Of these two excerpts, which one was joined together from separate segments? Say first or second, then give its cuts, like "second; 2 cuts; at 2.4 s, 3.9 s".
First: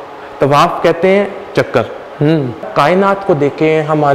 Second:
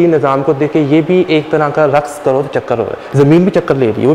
first; 1 cut; at 2.7 s